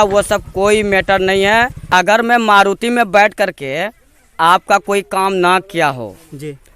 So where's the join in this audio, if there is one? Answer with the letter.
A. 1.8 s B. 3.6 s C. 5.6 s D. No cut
A